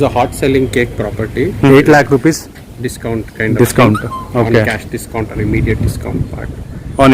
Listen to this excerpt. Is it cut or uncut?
cut